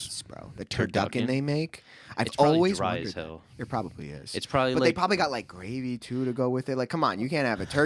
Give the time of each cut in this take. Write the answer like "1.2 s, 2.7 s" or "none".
none